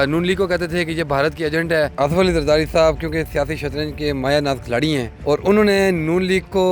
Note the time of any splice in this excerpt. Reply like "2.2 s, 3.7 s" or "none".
1.9 s, 5.1 s